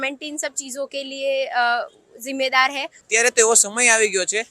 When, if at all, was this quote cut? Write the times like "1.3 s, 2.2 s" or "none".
2.9 s